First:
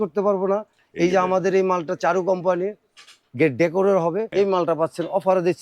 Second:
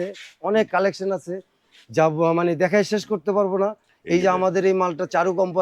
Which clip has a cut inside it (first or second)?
first